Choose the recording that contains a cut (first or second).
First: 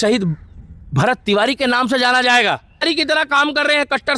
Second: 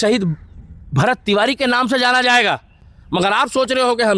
first